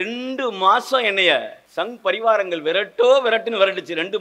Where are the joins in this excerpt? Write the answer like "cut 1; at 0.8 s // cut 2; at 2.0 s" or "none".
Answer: cut 1; at 1.6 s